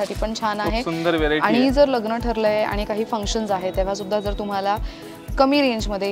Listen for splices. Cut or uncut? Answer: uncut